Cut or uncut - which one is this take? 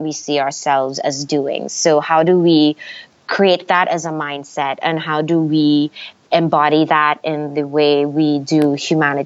uncut